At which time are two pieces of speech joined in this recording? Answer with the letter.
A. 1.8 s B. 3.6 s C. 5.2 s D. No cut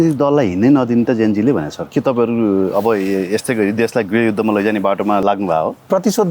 C